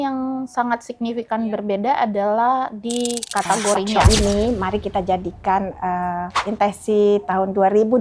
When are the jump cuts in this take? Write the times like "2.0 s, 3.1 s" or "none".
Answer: 3.9 s

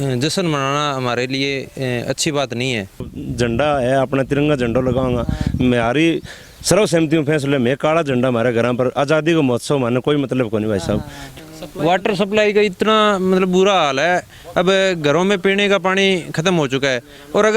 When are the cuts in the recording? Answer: 3.2 s, 11.3 s

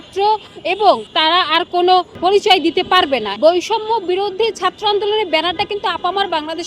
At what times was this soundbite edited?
1.1 s, 2.1 s, 3.3 s

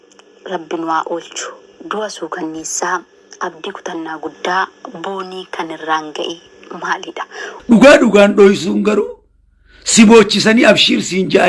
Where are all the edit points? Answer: 7.5 s

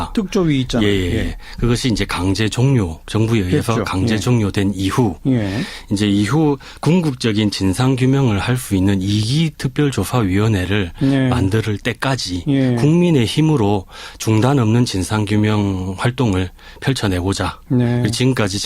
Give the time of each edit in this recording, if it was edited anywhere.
5.6 s

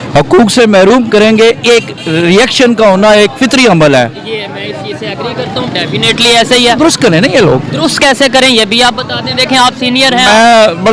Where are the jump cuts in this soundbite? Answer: none

